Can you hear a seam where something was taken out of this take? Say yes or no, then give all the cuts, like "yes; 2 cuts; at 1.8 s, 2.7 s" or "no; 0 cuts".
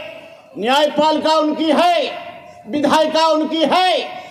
no; 0 cuts